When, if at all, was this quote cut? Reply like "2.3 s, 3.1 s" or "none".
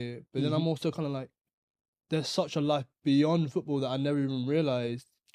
none